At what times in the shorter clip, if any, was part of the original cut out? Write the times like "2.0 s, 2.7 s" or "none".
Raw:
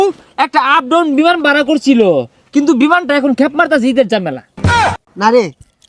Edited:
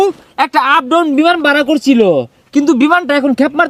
none